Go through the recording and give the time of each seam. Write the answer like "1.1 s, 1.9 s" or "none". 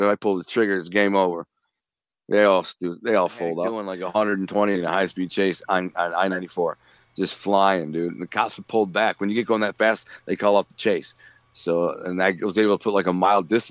4.0 s

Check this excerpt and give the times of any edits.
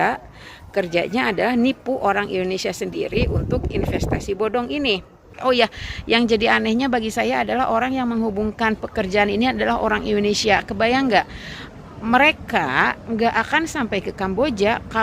5.4 s

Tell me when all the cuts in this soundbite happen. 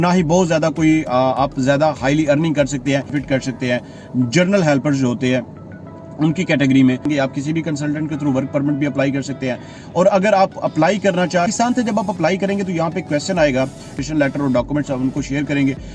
3.2 s, 7.1 s, 11.5 s, 14.0 s

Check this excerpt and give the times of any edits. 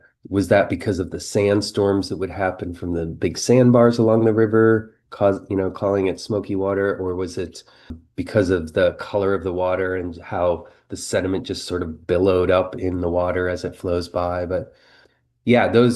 8.0 s, 15.0 s

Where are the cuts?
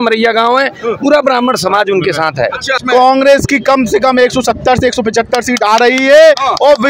2.8 s

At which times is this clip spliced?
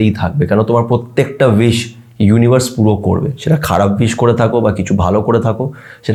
none

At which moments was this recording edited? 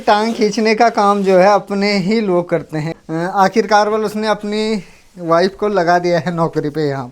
2.9 s

